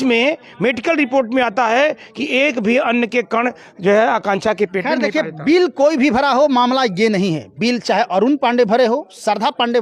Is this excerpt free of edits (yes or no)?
yes